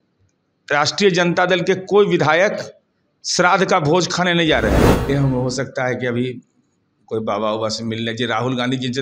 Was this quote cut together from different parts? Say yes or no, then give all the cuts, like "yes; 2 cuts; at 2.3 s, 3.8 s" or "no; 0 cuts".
yes; 1 cut; at 5.1 s